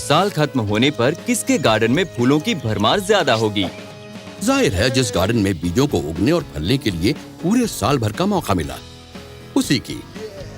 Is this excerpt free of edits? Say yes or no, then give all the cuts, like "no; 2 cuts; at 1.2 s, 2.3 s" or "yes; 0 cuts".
no; 1 cut; at 3.5 s